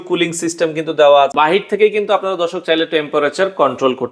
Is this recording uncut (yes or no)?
no